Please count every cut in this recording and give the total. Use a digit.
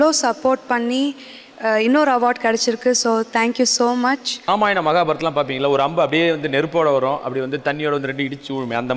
1